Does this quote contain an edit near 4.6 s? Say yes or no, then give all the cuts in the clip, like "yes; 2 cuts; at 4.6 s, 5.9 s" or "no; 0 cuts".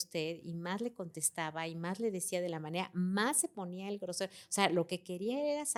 no; 0 cuts